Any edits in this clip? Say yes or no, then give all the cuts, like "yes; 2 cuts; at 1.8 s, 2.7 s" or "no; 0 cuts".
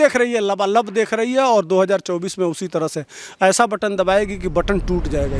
no; 0 cuts